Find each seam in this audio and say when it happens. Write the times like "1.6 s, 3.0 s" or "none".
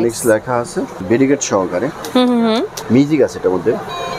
1.0 s, 2.7 s